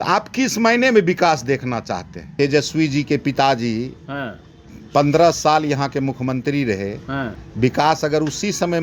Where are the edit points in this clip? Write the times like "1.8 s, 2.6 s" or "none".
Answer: 2.2 s, 7.4 s